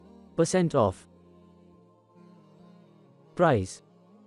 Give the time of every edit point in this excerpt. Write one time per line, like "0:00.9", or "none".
0:00.9
0:03.3